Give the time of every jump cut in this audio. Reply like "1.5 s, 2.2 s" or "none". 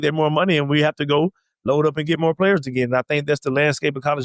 none